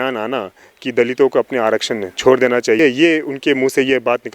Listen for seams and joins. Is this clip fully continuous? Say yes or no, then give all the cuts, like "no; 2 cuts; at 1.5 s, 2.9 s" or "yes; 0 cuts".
no; 1 cut; at 2.8 s